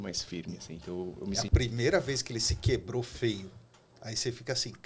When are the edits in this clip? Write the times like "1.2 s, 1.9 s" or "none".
1.4 s